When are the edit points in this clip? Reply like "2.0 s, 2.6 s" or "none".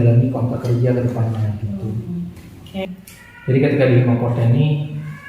2.9 s